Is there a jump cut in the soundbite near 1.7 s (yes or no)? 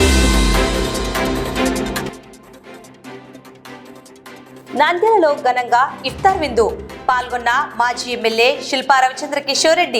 yes